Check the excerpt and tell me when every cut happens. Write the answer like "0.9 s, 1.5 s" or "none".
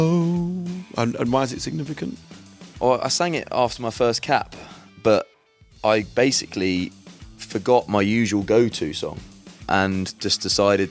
9.6 s